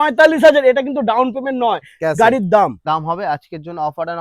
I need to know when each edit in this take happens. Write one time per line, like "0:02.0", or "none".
0:02.9